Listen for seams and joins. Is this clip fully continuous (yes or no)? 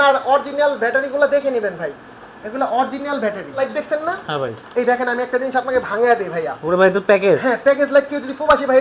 no